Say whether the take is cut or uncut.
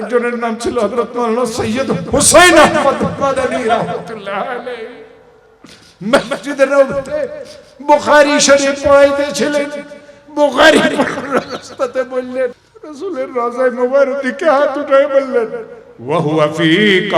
cut